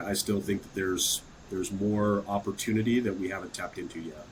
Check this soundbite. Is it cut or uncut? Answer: uncut